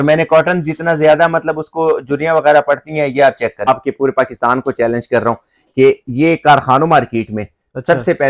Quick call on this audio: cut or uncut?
cut